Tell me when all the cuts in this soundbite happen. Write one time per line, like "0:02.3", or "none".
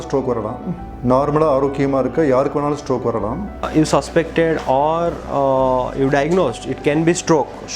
0:03.6

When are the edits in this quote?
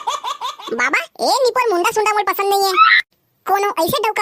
none

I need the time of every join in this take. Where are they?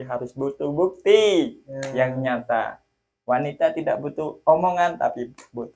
none

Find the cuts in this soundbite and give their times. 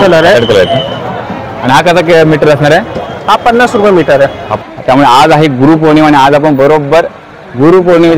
0:04.5

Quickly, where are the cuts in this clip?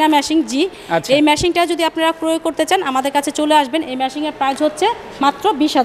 none

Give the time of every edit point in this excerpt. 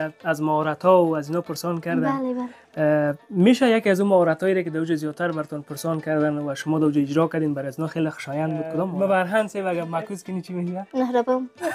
0:08.9

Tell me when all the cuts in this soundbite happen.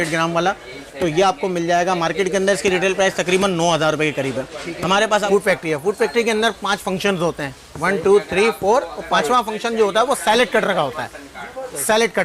0:05.2

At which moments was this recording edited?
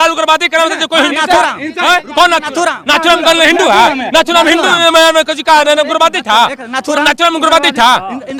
none

